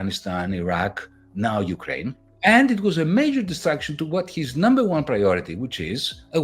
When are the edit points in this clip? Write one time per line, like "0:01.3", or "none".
0:02.1